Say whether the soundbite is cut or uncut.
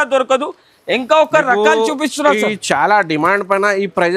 uncut